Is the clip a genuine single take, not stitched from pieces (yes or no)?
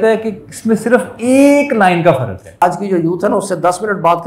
no